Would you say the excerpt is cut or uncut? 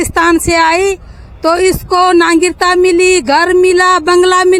uncut